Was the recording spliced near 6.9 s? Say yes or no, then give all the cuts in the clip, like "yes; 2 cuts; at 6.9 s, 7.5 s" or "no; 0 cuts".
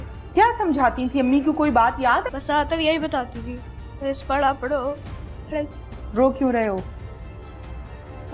no; 1 cut; at 2.3 s